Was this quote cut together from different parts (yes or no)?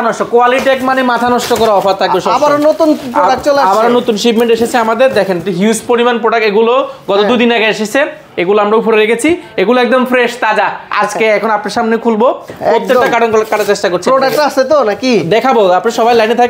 no